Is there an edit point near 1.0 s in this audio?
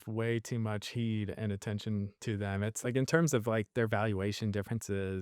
no; 1 cut; at 2.8 s

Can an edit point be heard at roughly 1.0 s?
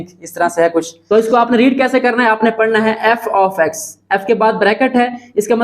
yes; 1 cut; at 1.0 s

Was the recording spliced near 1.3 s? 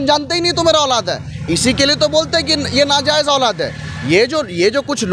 no; 0 cuts

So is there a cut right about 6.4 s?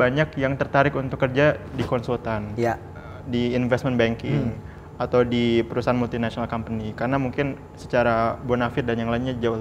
no; 0 cuts

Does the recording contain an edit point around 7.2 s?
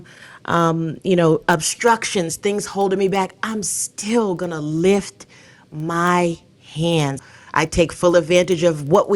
yes; 1 cut; at 7.2 s

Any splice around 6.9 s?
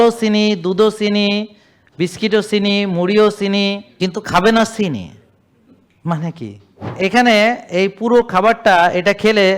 yes; 2 cuts; at 3.9 s, 6.9 s

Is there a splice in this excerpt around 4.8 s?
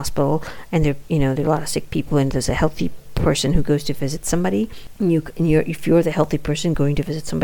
yes; 1 cut; at 4.8 s

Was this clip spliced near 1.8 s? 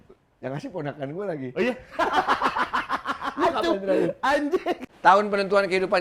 no; 1 cut; at 4.9 s

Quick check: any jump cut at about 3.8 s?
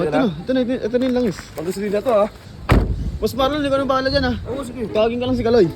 no; 1 cut; at 2.5 s

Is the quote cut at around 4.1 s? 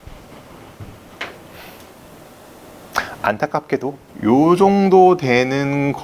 yes; 1 cut; at 4.1 s

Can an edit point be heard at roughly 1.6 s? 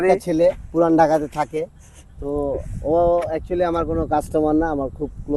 no; 0 cuts

